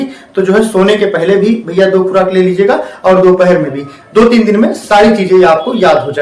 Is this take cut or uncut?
uncut